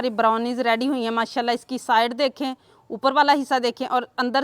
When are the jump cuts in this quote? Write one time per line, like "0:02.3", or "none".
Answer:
none